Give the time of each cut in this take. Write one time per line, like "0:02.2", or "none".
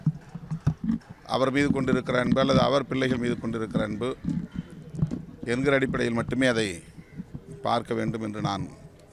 none